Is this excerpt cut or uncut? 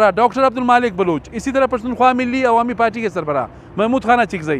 uncut